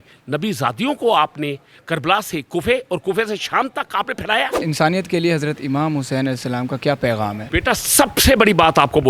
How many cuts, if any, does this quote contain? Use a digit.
2